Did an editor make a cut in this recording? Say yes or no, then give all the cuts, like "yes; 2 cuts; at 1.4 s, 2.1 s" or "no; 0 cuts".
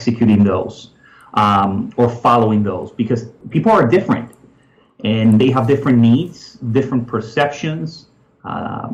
yes; 1 cut; at 3.4 s